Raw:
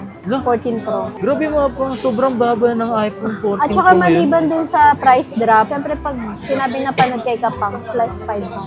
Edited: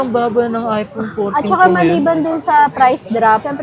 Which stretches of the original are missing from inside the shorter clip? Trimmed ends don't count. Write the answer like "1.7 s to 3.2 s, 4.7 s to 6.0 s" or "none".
none